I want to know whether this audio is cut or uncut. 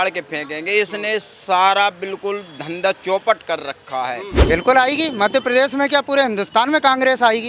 cut